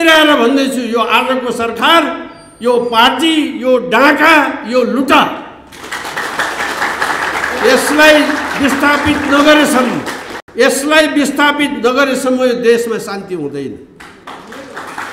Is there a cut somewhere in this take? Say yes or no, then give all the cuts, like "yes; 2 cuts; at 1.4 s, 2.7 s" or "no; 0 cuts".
no; 0 cuts